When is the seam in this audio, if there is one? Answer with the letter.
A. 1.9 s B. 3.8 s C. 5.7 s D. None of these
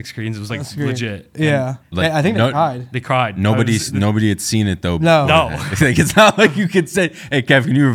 A